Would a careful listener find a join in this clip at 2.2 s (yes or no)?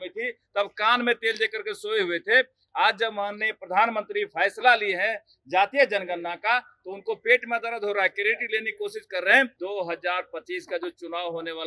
no